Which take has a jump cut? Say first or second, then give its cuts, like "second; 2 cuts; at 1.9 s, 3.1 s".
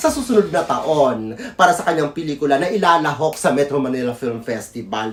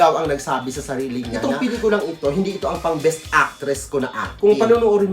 second; 2 cuts; at 1.3 s, 4.3 s